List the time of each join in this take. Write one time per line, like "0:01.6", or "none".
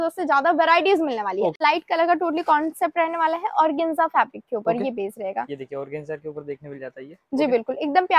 0:01.6